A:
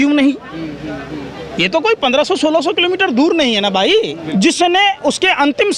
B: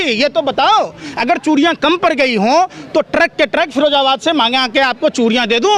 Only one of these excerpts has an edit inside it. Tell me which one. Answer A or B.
A